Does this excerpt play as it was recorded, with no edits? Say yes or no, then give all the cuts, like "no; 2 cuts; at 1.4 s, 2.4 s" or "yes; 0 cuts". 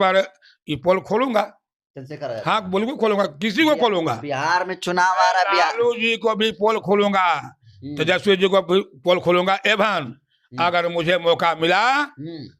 yes; 0 cuts